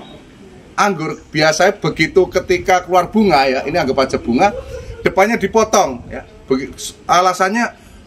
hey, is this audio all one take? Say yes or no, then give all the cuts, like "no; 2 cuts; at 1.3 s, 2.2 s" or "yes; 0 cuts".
yes; 0 cuts